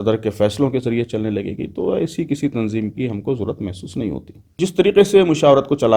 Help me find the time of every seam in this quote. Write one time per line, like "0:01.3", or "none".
0:04.6